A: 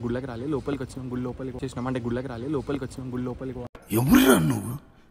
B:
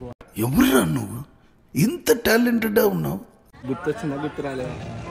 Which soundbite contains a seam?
B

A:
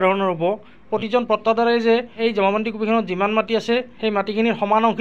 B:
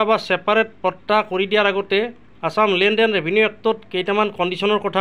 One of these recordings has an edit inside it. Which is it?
A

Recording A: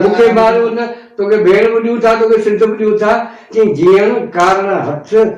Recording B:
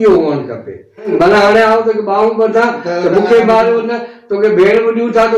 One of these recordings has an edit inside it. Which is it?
B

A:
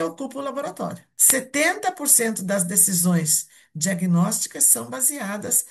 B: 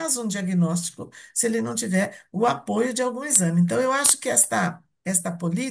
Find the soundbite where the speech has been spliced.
A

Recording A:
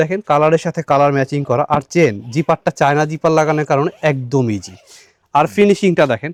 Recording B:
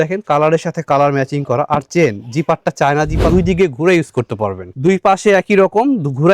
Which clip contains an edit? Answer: B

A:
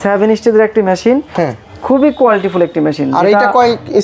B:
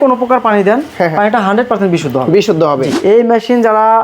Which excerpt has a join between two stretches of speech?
B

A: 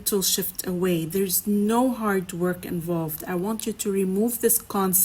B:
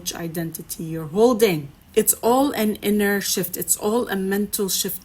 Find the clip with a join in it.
B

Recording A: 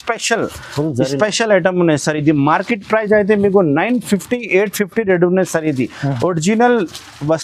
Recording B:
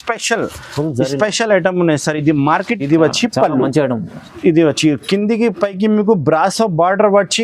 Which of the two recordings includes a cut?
B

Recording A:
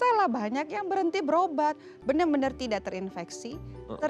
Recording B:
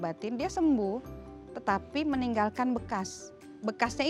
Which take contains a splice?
A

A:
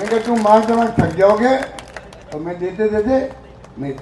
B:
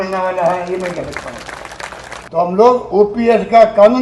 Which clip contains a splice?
B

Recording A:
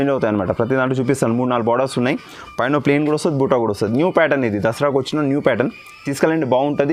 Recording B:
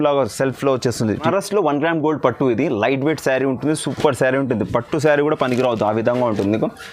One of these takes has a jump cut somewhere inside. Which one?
B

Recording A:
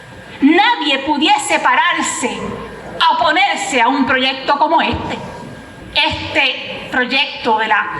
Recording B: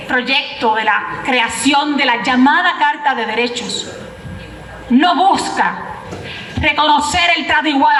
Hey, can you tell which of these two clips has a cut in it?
A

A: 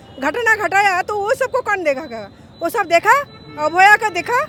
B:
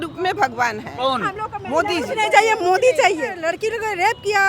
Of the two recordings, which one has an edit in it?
B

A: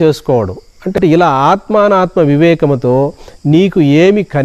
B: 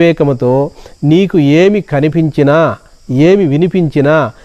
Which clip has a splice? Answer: A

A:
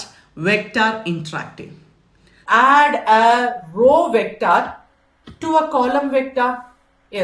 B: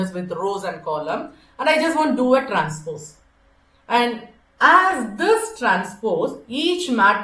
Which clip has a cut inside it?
A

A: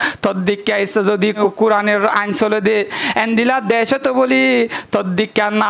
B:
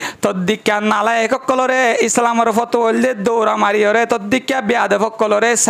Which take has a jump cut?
A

